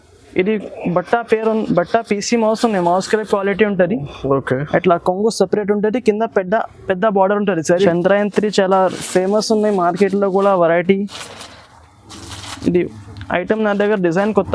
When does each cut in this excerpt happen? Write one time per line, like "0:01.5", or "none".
0:07.8